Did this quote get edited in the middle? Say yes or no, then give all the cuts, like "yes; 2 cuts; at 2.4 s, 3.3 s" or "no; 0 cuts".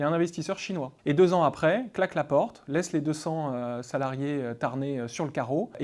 yes; 1 cut; at 1.0 s